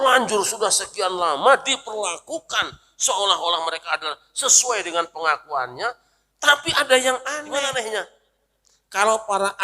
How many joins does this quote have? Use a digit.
1